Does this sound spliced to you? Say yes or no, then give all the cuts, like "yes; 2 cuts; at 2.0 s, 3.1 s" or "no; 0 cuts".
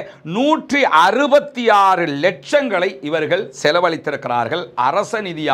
no; 0 cuts